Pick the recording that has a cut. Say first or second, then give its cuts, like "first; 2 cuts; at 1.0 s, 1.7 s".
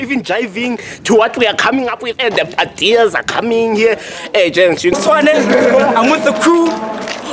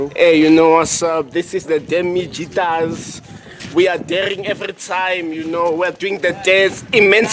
first; 1 cut; at 4.9 s